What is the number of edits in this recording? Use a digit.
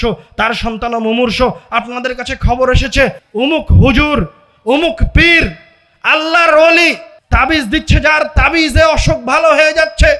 2